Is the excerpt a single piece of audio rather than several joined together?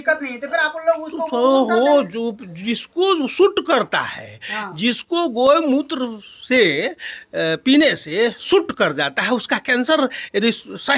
yes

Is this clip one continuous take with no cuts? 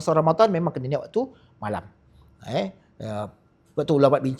yes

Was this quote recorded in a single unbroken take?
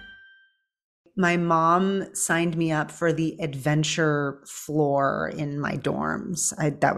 no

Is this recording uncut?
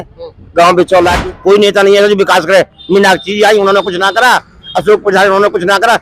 no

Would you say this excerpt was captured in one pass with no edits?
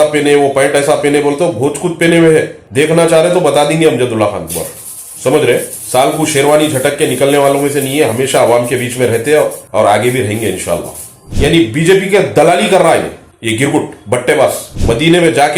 no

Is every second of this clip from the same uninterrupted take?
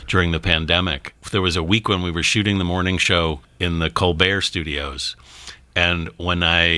no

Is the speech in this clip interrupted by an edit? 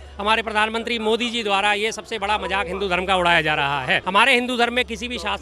yes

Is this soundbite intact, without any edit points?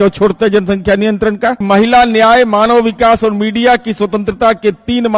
no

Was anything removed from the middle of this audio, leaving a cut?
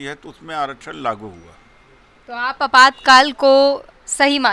no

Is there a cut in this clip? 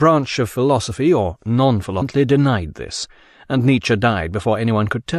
no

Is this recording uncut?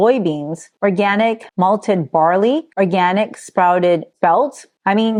yes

